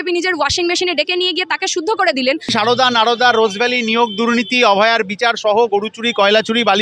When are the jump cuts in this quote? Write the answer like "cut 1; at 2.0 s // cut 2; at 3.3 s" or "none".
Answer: cut 1; at 2.5 s